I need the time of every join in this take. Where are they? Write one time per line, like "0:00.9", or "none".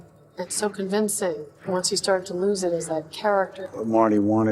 0:01.5
0:03.6